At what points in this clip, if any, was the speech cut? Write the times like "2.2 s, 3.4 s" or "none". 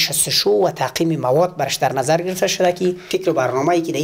3.0 s